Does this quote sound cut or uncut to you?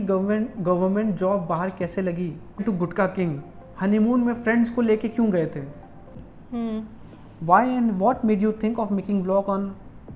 cut